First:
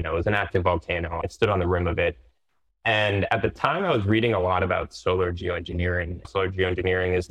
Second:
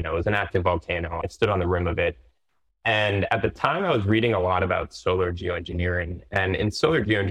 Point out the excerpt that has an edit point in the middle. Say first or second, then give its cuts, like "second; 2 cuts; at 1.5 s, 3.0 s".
first; 1 cut; at 6.3 s